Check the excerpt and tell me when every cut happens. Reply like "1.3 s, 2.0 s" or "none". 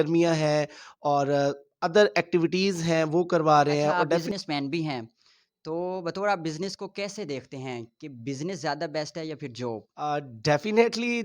4.3 s, 9.9 s